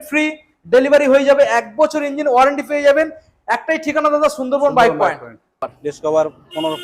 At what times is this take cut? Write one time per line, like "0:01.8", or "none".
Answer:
0:05.8